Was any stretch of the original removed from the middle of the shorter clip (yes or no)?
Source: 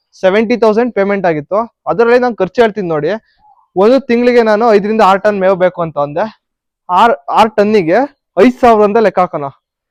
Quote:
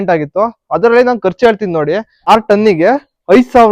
yes